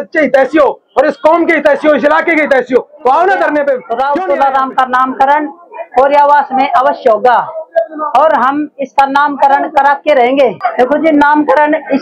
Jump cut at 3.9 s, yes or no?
yes